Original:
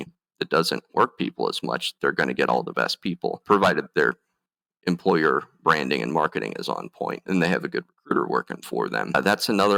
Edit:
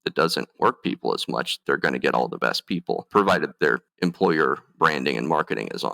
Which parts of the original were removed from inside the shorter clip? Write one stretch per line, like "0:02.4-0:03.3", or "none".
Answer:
0:04.2-0:04.7